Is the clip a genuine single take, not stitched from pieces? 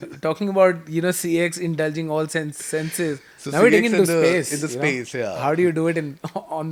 yes; 0 cuts

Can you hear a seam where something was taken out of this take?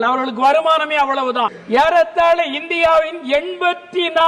yes; 1 cut; at 1.6 s

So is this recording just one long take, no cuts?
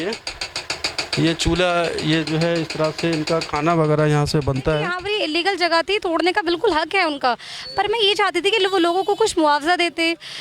no; 1 cut; at 5.0 s

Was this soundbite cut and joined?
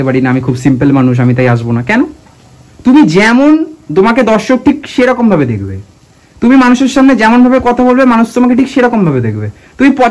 no; 0 cuts

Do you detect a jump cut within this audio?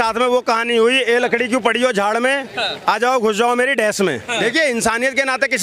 yes; 1 cut; at 4.4 s

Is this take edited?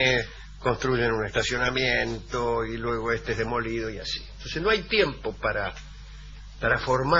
yes; 1 cut; at 3.8 s

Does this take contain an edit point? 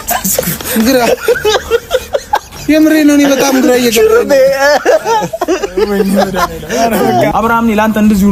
yes; 1 cut; at 7.3 s

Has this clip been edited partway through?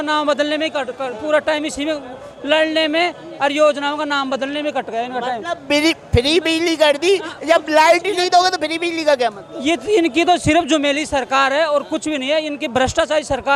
no; 0 cuts

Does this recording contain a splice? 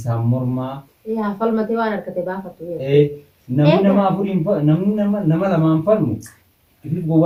no; 0 cuts

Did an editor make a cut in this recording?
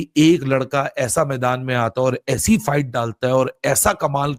no; 0 cuts

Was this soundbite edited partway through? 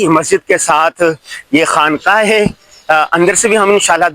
no; 0 cuts

